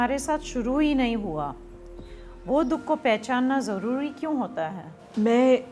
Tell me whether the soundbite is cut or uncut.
uncut